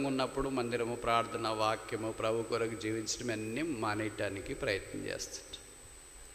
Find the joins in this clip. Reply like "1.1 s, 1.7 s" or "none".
none